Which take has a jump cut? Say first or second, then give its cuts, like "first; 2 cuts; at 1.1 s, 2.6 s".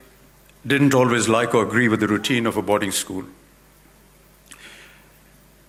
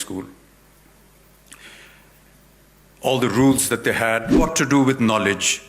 second; 1 cut; at 4.4 s